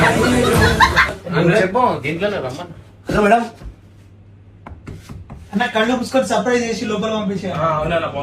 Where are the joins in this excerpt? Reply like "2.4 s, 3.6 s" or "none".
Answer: 1.1 s